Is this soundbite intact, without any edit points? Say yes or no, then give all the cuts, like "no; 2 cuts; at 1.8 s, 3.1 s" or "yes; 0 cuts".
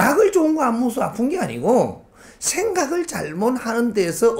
yes; 0 cuts